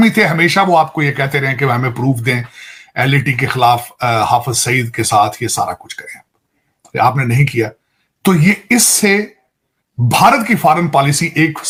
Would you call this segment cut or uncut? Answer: uncut